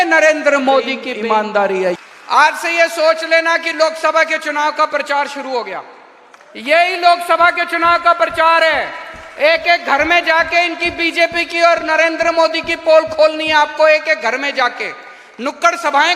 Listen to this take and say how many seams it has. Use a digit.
2